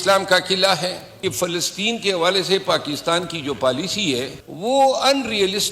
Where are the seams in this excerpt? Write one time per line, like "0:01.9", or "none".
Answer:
0:01.2
0:04.4